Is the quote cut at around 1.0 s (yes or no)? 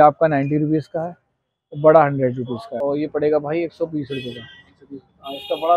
no